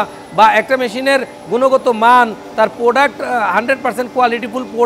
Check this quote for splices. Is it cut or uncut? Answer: uncut